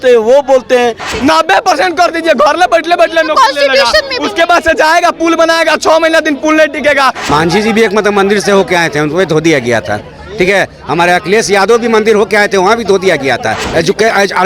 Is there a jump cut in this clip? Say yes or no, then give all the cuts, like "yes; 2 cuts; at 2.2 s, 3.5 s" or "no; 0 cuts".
yes; 3 cuts; at 1.1 s, 7.2 s, 13.6 s